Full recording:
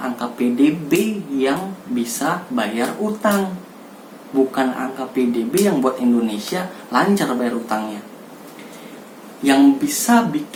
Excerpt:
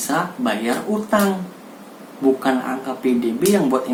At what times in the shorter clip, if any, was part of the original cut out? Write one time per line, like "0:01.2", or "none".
none